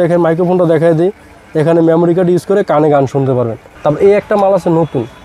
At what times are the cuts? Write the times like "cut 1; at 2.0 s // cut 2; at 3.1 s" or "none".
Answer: cut 1; at 3.6 s